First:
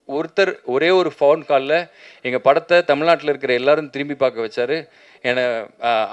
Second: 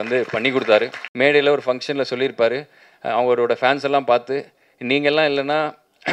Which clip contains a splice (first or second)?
second